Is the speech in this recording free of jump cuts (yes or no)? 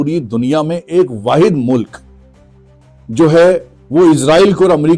yes